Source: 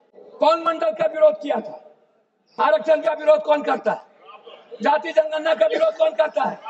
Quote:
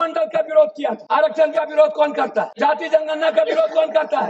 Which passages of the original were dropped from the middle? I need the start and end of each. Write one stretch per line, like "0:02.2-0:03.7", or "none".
0:01.7-0:02.5
0:04.0-0:04.8